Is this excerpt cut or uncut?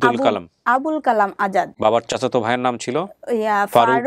cut